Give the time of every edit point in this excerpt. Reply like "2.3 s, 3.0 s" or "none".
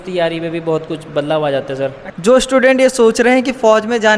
2.1 s